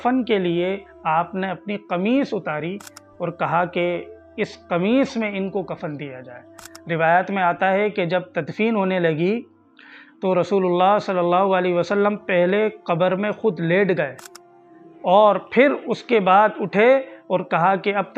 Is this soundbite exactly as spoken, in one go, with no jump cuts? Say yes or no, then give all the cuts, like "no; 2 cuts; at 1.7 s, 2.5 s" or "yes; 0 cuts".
yes; 0 cuts